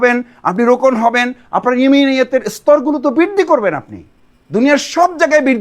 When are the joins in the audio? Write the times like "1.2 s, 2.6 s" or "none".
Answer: none